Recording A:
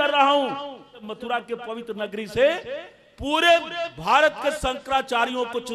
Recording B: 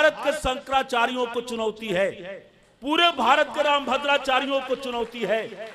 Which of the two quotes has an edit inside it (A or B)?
A